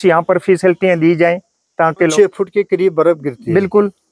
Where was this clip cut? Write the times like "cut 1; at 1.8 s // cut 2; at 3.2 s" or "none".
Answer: cut 1; at 2.1 s